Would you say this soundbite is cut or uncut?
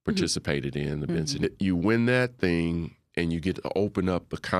cut